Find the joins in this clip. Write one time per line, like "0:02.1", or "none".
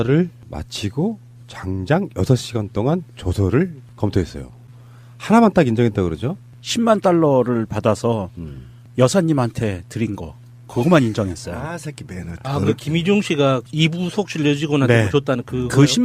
0:04.7